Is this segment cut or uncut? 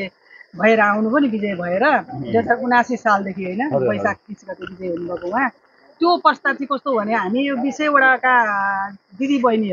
uncut